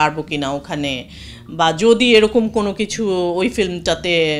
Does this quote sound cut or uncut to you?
uncut